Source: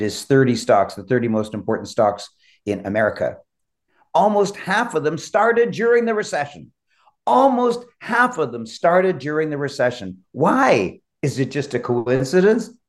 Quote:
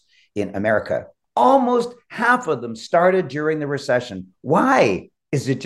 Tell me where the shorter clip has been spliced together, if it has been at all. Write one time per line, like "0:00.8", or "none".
0:01.2